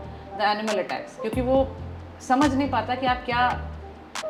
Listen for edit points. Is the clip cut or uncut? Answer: uncut